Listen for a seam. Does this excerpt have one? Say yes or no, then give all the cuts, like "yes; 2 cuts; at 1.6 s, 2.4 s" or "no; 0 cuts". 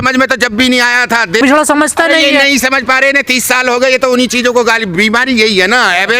yes; 1 cut; at 1.4 s